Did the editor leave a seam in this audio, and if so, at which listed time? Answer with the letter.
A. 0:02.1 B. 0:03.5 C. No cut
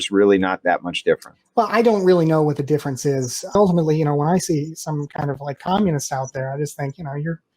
B